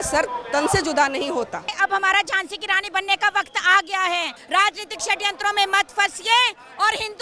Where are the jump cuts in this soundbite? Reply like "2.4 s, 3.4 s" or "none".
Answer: 1.7 s, 4.3 s